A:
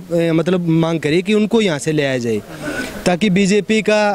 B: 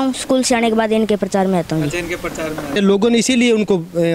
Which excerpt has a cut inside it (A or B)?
B